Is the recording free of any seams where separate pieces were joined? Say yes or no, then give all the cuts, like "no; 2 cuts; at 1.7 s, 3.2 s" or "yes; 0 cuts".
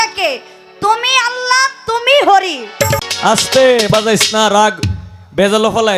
no; 1 cut; at 3.0 s